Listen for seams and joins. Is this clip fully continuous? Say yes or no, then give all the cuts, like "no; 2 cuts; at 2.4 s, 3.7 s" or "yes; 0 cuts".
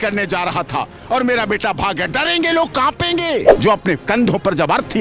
no; 1 cut; at 3.5 s